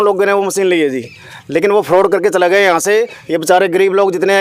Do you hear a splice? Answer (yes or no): no